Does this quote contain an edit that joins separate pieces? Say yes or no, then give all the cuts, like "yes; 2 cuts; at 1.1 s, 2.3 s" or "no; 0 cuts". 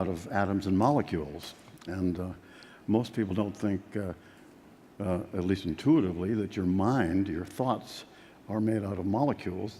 no; 0 cuts